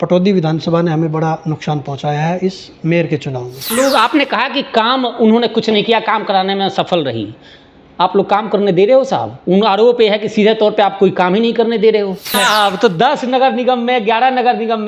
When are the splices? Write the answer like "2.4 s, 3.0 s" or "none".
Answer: 3.7 s, 12.3 s